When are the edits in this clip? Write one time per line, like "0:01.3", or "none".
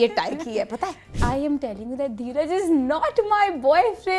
0:01.1